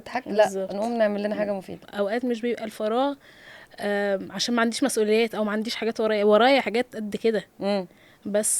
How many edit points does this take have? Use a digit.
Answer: 1